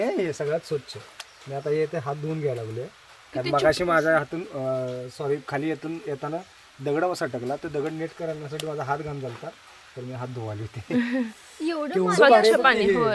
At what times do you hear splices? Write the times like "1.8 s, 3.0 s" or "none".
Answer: none